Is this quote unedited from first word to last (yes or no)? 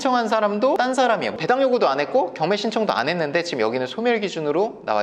no